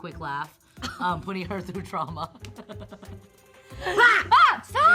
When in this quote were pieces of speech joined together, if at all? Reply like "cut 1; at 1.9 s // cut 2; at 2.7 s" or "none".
none